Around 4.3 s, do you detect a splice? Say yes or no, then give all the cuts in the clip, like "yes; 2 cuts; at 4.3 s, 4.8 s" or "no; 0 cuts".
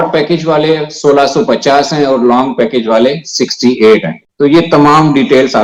no; 0 cuts